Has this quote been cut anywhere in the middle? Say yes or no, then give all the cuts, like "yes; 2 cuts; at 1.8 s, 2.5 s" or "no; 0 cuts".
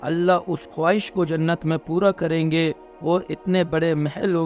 no; 0 cuts